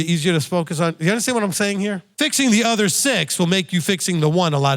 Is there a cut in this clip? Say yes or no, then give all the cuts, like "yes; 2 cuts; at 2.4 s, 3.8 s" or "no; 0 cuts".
yes; 1 cut; at 2.1 s